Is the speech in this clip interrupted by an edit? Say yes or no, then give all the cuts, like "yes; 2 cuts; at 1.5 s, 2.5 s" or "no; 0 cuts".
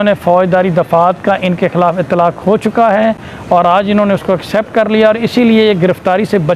no; 0 cuts